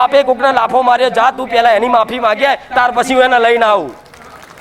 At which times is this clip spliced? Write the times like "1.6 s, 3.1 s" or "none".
none